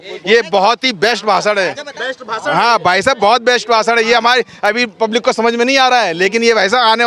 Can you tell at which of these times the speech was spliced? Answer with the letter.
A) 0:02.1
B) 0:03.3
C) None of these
C